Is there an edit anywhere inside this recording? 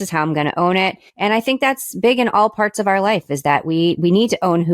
yes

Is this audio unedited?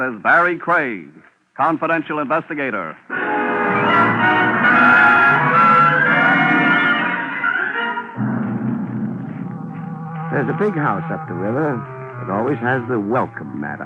yes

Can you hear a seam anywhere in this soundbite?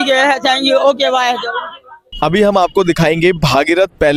no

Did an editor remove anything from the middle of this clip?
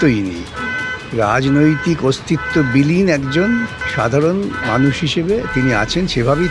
yes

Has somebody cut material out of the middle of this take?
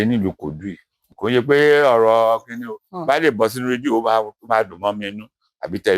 yes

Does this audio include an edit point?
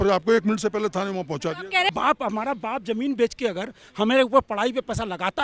yes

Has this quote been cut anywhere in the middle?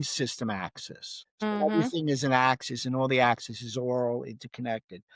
yes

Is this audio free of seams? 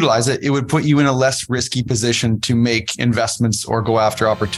yes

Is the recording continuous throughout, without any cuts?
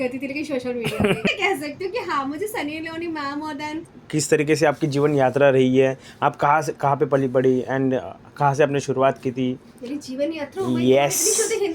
no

